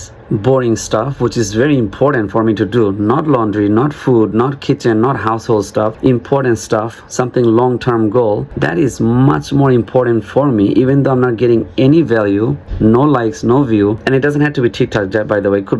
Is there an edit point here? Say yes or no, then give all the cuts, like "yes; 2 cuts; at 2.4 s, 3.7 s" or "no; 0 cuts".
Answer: no; 0 cuts